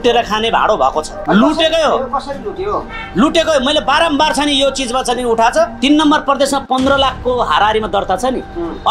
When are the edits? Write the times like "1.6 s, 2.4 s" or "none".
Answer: 1.2 s, 5.8 s